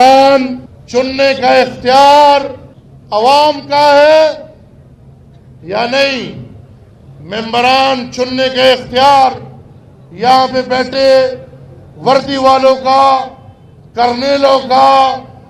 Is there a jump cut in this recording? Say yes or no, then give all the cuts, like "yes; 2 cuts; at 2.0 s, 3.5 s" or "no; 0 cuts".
no; 0 cuts